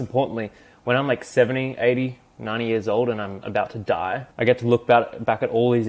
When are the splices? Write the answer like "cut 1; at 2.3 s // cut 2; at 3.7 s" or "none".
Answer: cut 1; at 4.3 s